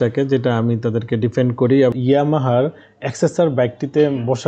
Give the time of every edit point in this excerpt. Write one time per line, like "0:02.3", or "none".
0:02.0

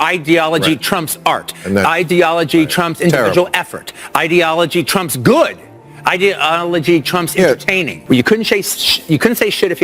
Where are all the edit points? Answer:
0:07.9

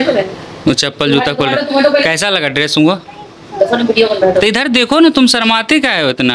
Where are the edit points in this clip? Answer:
none

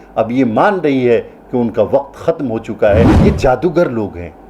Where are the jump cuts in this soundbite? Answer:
0:03.1

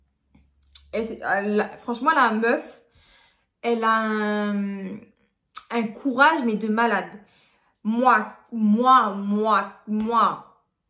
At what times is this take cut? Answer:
none

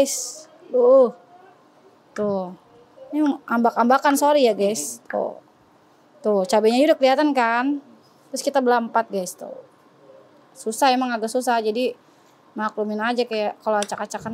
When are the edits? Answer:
none

